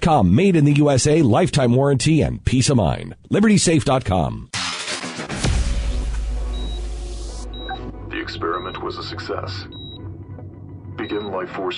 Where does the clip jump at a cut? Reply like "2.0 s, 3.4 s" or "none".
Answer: 4.4 s